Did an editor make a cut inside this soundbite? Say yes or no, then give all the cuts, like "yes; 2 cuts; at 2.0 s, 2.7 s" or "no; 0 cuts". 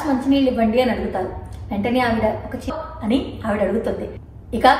yes; 1 cut; at 2.7 s